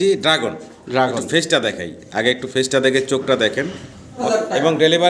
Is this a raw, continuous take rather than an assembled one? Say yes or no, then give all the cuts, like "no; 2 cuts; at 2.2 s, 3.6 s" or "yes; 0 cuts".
no; 1 cut; at 4.1 s